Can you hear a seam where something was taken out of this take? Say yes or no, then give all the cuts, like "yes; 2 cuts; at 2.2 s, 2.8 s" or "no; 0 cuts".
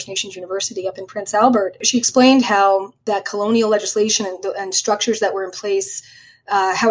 no; 0 cuts